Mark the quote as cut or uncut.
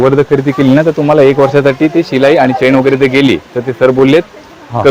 uncut